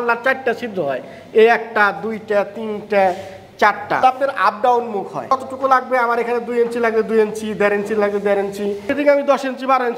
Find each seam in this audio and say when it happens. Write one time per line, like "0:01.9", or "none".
0:04.0
0:05.3
0:08.9

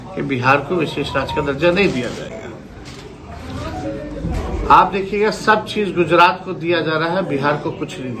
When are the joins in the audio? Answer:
none

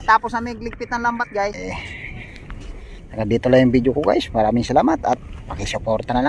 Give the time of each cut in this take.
0:01.6

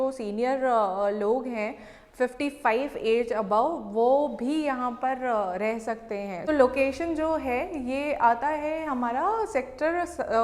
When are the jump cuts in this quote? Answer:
0:06.4

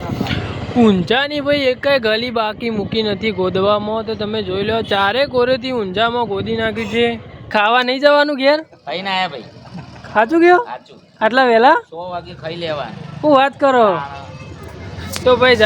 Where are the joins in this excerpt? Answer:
0:07.5

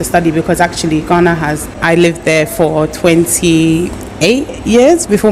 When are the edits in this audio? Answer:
0:01.6

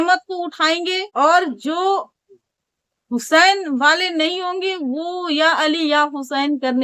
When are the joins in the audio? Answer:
0:01.0

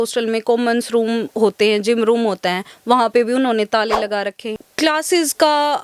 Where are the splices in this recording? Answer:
0:04.5

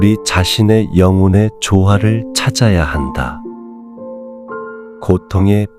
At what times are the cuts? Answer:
none

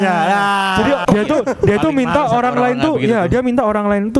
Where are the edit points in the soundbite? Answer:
0:01.0

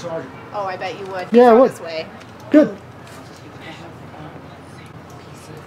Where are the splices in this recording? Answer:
none

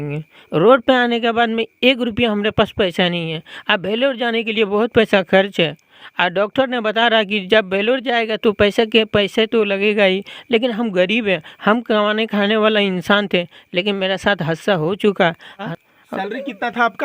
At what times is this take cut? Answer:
0:15.7

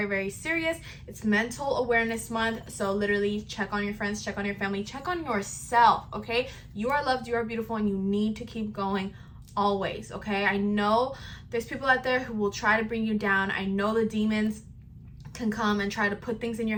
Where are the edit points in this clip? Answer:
none

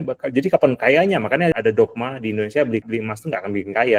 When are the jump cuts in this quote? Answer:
0:01.5
0:02.8

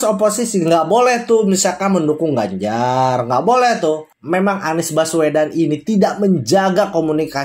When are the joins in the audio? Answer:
0:04.1

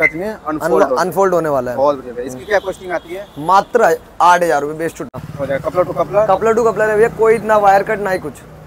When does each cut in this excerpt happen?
0:05.1

